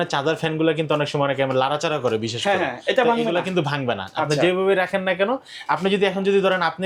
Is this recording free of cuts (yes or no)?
yes